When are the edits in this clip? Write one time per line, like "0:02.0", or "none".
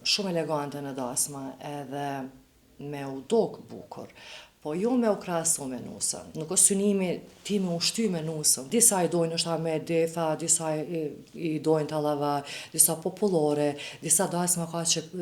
0:06.3
0:08.5